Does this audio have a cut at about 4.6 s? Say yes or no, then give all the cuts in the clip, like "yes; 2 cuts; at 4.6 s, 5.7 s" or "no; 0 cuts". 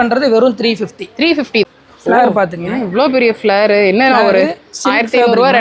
no; 1 cut; at 1.7 s